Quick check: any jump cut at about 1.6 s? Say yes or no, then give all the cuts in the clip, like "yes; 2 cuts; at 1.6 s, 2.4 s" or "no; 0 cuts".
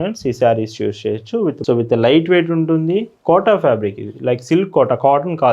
yes; 1 cut; at 1.6 s